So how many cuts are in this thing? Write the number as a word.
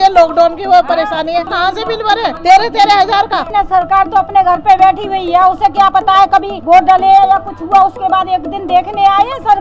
two